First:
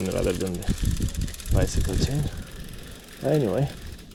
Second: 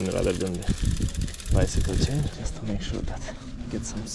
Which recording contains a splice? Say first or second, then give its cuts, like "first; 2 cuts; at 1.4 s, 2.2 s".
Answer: second; 1 cut; at 2.5 s